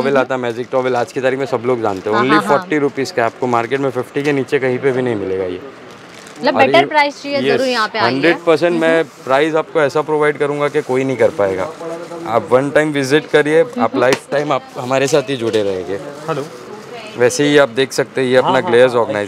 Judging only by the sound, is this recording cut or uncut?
uncut